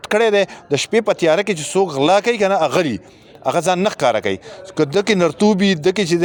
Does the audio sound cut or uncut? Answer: uncut